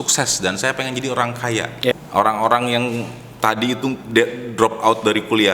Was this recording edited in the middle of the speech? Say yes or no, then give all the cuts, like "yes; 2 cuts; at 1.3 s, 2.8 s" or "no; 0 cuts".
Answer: yes; 1 cut; at 1.9 s